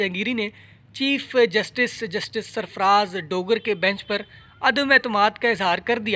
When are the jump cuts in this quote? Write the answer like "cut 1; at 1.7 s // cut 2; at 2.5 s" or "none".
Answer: none